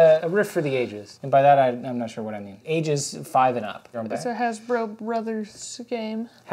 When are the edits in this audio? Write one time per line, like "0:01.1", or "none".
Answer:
none